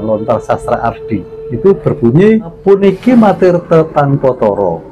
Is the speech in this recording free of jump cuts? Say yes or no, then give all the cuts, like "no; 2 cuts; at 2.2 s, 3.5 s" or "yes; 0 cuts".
no; 2 cuts; at 1.4 s, 2.6 s